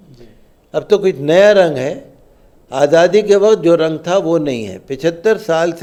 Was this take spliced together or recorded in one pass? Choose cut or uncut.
uncut